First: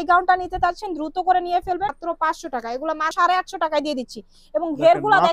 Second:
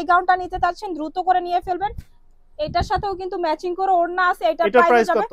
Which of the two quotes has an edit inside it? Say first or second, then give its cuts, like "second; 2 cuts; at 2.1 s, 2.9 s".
first; 2 cuts; at 2.0 s, 3.1 s